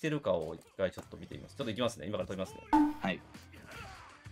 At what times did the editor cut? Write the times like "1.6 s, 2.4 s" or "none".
2.6 s